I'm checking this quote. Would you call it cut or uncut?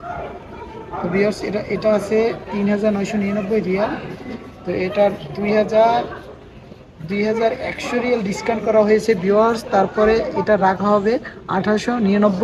uncut